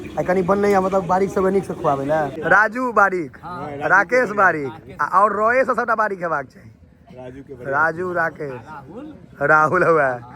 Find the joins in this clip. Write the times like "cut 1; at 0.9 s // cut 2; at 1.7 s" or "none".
cut 1; at 2.4 s